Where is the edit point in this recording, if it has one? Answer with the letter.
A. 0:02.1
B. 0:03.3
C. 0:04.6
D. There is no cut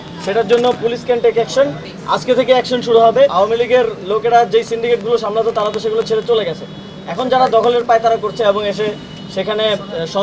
B